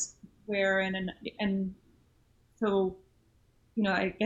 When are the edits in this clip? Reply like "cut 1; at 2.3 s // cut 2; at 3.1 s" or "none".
none